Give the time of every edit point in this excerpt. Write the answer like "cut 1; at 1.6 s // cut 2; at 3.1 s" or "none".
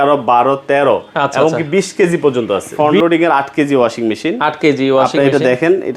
cut 1; at 2.7 s